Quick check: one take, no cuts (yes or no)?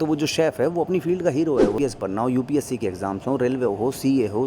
no